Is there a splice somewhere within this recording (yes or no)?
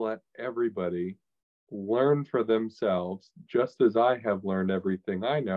no